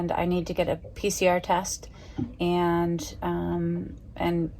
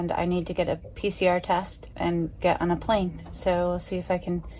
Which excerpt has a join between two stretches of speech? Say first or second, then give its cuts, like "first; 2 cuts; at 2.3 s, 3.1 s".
second; 1 cut; at 1.8 s